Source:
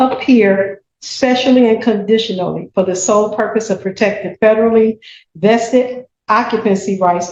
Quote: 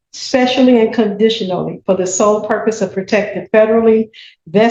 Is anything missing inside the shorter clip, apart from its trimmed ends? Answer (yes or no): no